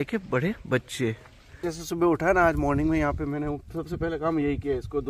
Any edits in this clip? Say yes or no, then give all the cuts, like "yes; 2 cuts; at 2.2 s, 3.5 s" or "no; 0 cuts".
yes; 1 cut; at 1.6 s